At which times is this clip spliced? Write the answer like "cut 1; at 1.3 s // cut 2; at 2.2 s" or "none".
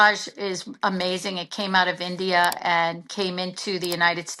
none

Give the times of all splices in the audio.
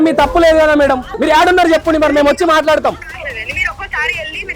cut 1; at 1.1 s

